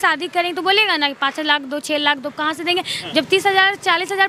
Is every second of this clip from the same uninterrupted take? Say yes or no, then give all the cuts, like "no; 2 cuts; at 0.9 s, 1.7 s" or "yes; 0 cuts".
yes; 0 cuts